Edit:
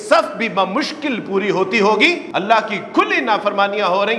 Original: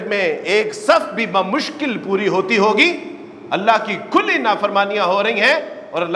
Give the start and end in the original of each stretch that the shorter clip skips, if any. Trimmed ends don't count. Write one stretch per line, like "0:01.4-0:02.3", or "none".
0:03.0-0:03.4